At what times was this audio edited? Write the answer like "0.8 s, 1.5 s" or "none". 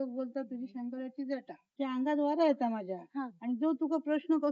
1.6 s